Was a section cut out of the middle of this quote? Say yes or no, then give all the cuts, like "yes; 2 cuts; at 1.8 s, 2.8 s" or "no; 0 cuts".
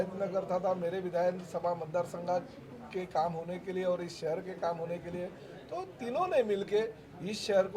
no; 0 cuts